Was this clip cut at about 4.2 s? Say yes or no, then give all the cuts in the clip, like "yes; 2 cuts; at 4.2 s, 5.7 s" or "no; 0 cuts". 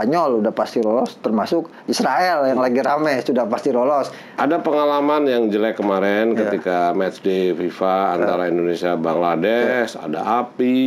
yes; 1 cut; at 4.2 s